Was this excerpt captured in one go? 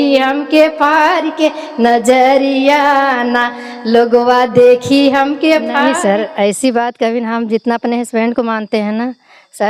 no; 1 cut; at 5.8 s

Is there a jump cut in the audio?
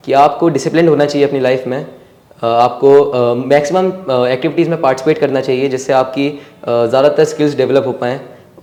no; 0 cuts

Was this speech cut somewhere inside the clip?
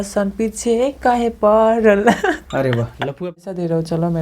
yes; 1 cut; at 3.2 s

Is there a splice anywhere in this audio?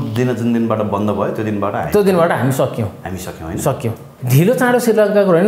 yes; 1 cut; at 4.1 s

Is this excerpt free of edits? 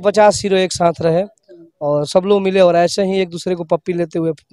yes; 0 cuts

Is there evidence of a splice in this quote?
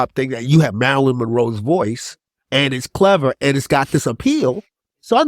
no; 0 cuts

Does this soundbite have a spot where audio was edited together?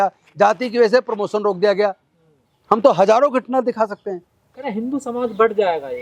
no; 0 cuts

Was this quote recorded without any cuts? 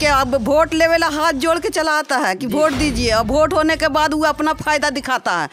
yes; 0 cuts

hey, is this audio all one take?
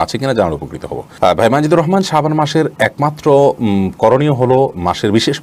yes; 0 cuts

